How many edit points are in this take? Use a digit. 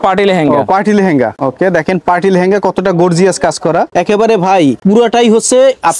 3